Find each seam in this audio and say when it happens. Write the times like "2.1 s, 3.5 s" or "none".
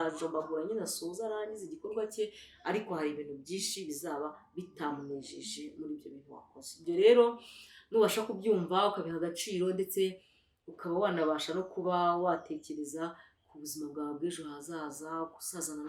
none